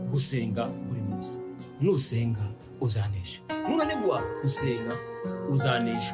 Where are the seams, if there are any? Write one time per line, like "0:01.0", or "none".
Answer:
none

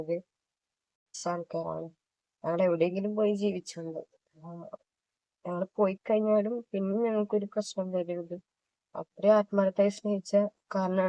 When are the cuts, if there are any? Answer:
0:01.2

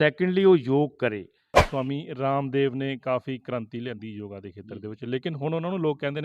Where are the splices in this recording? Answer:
0:01.6

